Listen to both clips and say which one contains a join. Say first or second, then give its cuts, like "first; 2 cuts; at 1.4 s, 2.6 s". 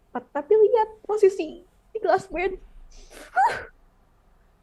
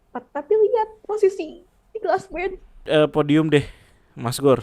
second; 1 cut; at 2.8 s